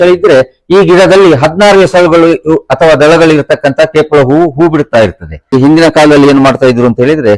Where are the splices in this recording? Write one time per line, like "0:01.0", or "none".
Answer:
0:05.5